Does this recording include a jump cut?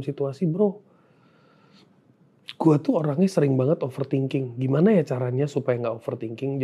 no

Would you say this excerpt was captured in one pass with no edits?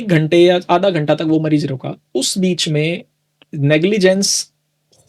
yes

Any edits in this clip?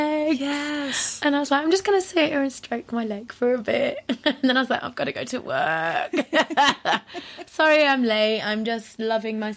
no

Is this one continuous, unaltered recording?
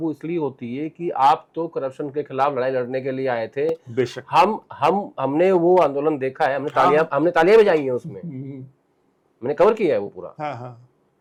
yes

